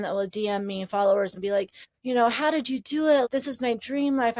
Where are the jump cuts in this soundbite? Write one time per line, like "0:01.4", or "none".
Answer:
0:01.5
0:03.3